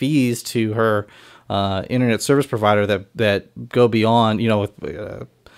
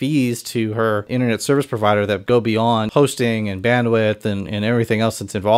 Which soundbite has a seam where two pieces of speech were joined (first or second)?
second